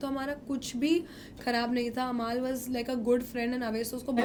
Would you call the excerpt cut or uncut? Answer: uncut